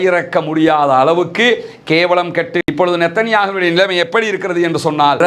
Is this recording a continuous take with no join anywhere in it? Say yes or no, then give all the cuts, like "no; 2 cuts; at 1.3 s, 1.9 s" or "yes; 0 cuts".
no; 1 cut; at 2.7 s